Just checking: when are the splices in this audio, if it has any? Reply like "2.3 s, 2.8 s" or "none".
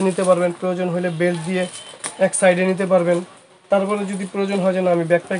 none